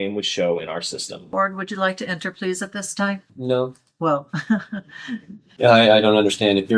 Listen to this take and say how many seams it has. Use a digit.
2